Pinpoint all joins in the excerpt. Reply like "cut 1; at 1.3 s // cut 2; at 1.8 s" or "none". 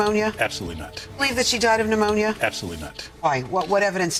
none